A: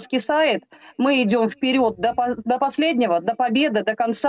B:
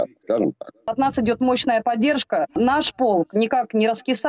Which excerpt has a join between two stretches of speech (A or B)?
B